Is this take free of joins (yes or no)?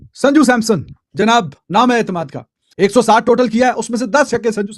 no